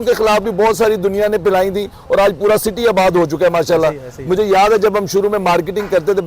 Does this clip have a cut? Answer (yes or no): no